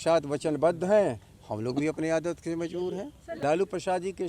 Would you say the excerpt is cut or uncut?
cut